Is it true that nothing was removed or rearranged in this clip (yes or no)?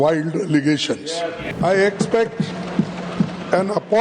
no